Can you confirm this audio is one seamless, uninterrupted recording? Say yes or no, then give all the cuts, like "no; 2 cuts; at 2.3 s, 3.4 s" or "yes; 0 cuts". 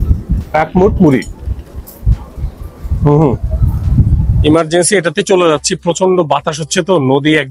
no; 1 cut; at 4.3 s